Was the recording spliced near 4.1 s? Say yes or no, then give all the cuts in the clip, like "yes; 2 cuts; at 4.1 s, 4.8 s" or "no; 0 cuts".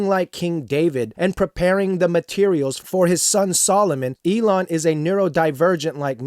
yes; 1 cut; at 4.1 s